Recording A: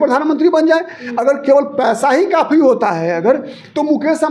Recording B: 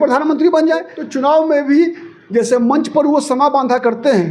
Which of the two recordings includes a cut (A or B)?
B